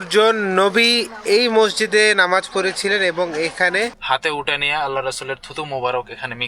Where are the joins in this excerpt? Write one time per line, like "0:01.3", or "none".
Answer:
0:04.0